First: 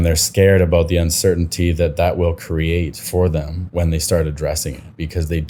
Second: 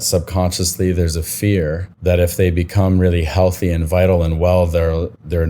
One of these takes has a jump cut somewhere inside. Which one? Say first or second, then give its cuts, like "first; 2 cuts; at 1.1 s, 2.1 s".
second; 1 cut; at 1.9 s